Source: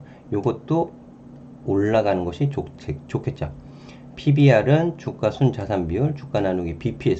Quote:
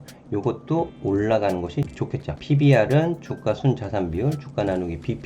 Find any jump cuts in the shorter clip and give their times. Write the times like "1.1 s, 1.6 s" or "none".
0.9 s, 2.0 s